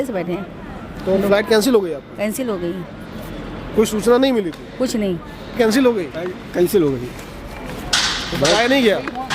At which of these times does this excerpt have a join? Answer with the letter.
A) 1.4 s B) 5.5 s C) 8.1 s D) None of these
B